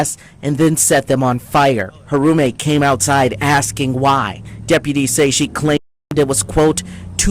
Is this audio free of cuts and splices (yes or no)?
no